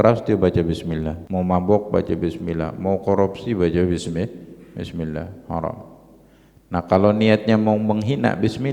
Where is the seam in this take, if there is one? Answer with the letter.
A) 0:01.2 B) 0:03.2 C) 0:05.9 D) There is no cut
A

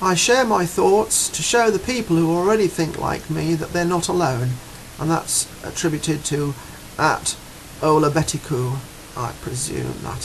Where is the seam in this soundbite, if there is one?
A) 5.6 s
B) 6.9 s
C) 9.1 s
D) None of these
A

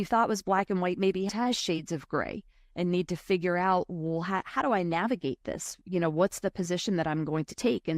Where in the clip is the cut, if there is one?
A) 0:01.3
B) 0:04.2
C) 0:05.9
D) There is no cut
A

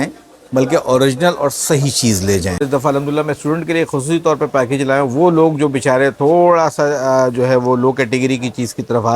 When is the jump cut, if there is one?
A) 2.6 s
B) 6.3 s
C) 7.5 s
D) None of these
A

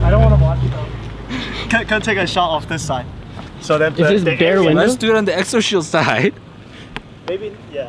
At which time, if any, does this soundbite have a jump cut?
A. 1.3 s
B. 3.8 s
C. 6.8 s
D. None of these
D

